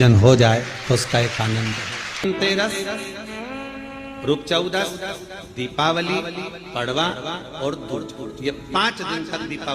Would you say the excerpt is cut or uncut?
cut